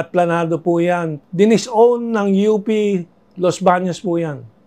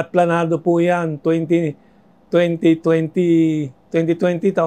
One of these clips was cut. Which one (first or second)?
first